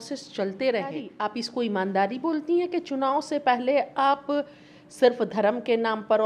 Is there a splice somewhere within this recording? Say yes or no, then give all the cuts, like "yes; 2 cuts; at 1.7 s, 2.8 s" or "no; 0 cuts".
yes; 1 cut; at 1.1 s